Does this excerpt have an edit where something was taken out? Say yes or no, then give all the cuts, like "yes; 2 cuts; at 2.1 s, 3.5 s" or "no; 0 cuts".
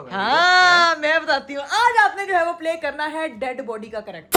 no; 0 cuts